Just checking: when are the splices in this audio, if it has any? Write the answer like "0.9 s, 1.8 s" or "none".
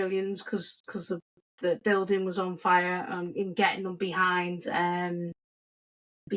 none